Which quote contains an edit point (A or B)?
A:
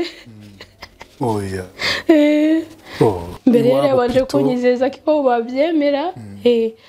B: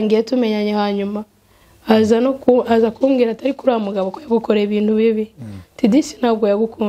A